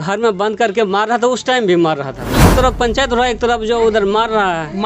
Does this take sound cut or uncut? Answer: cut